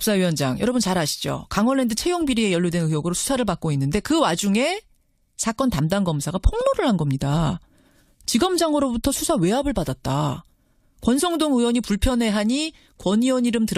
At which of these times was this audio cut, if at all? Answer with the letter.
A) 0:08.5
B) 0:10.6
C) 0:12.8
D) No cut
B